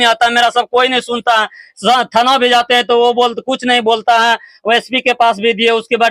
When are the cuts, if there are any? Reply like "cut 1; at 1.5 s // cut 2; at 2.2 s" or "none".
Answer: none